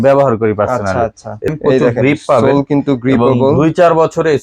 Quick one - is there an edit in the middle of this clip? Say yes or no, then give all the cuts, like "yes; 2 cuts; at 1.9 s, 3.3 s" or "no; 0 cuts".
yes; 1 cut; at 1.5 s